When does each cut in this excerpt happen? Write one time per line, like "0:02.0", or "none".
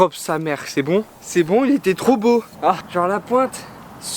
0:02.8